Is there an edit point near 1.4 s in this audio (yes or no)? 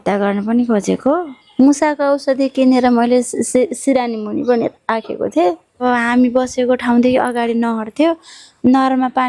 yes